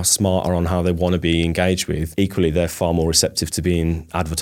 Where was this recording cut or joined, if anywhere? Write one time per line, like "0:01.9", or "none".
0:02.0
0:03.5

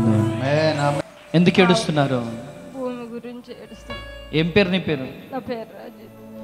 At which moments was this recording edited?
0:01.0

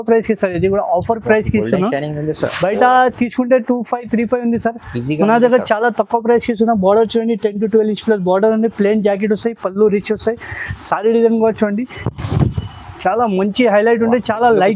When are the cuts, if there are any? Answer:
none

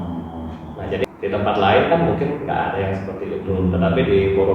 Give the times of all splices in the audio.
0:01.0

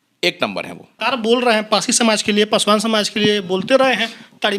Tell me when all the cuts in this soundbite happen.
0:00.9

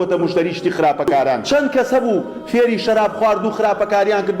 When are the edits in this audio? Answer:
0:01.4

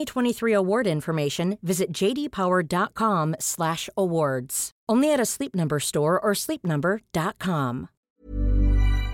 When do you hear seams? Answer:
0:08.2

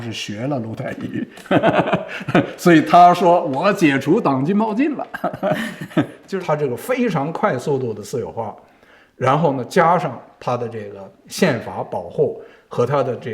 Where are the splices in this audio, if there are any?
0:06.2

